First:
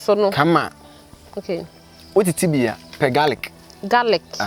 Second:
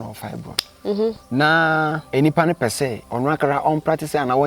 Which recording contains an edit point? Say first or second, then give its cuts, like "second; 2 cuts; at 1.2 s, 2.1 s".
second; 3 cuts; at 1.2 s, 2.0 s, 3.0 s